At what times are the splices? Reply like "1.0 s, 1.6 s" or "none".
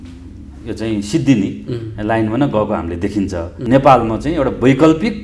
3.5 s